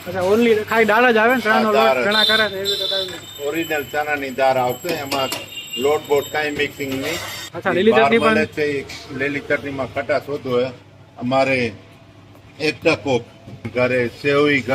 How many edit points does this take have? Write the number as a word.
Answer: two